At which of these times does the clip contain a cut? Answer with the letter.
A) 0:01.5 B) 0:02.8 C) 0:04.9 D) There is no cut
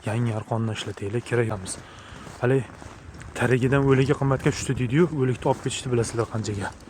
A